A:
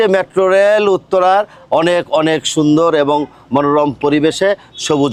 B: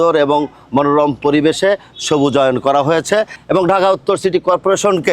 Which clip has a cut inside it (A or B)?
B